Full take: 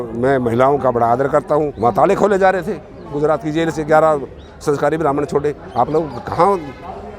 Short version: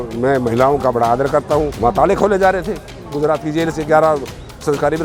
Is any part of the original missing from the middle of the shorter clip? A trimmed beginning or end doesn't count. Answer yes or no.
no